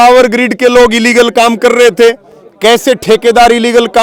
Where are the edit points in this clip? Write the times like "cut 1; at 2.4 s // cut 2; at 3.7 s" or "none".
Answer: none